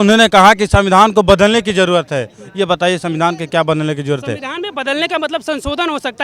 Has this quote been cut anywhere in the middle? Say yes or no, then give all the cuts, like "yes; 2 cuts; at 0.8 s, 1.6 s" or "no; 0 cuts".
no; 0 cuts